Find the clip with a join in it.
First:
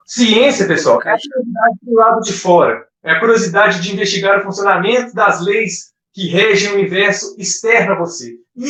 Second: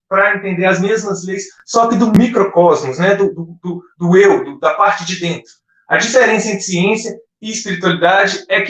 second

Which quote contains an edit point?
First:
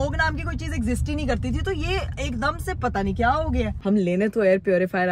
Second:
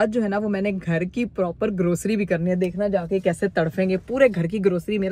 first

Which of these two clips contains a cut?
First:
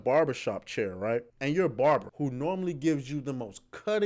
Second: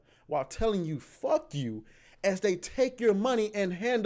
first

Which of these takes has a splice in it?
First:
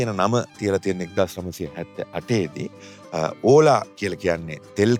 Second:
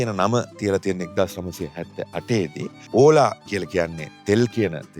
second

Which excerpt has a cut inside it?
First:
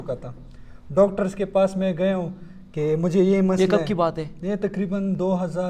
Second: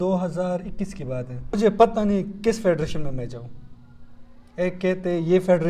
second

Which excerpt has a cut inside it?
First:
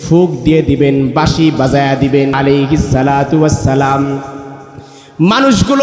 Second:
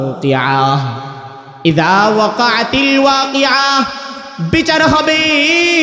first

